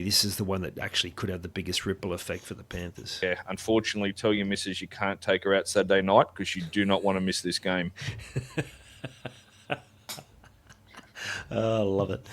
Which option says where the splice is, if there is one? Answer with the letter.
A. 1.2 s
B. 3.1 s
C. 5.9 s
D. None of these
B